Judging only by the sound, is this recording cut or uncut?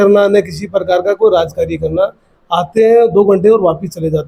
uncut